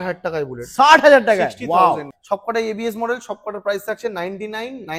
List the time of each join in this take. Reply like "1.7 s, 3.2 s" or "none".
2.1 s